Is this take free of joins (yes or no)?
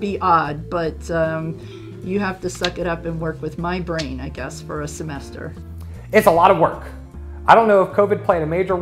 yes